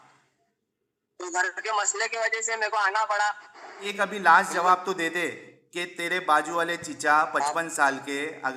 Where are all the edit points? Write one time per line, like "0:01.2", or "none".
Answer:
0:03.9